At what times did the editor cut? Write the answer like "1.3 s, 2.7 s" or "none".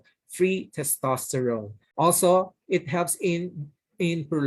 1.8 s